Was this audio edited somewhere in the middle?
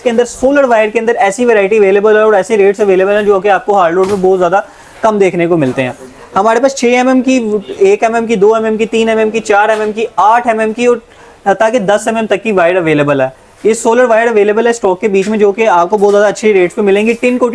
no; 0 cuts

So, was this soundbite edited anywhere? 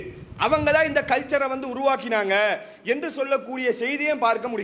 no; 0 cuts

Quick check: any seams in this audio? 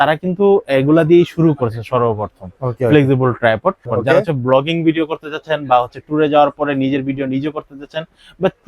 yes; 1 cut; at 3.9 s

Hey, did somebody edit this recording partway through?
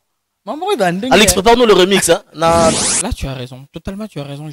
yes; 1 cut; at 2.7 s

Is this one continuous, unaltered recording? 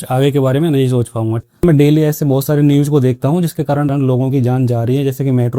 no; 1 cut; at 1.4 s

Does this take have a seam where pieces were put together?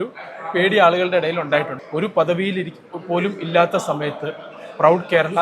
yes; 1 cut; at 1.8 s

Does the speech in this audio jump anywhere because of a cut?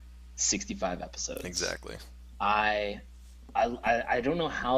yes; 1 cut; at 1.1 s

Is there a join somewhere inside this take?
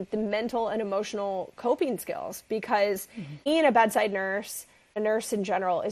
yes; 2 cuts; at 3.5 s, 5.0 s

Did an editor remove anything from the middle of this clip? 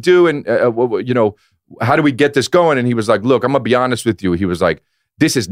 no; 0 cuts

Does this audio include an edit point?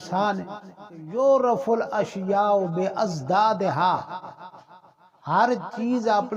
yes; 1 cut; at 1.1 s

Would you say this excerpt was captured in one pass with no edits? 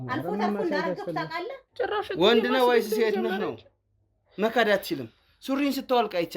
no; 1 cut; at 1.6 s

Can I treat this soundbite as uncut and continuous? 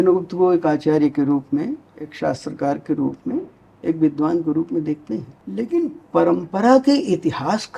no; 2 cuts; at 2.1 s, 5.4 s

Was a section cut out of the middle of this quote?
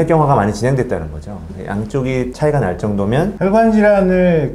yes; 1 cut; at 3.3 s

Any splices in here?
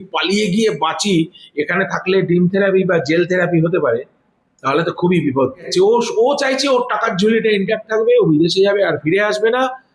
yes; 1 cut; at 5.7 s

